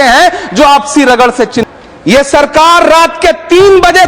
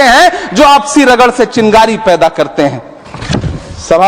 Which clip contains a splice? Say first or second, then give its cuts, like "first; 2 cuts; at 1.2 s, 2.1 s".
first; 1 cut; at 1.6 s